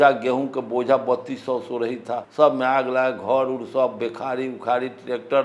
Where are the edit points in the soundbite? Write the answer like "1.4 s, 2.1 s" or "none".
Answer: none